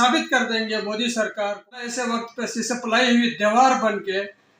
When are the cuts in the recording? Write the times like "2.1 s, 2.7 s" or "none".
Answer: 2.0 s